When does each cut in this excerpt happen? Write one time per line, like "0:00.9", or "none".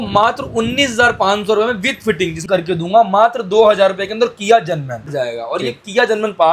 0:02.4
0:05.0